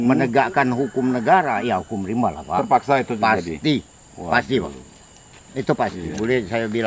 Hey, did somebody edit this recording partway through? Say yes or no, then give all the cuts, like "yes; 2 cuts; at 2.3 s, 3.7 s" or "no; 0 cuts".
no; 0 cuts